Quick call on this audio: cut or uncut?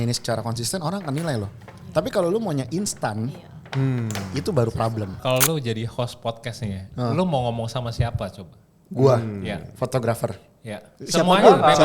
cut